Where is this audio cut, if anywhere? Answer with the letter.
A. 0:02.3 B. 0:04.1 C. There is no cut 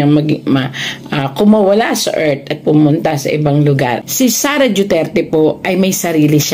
B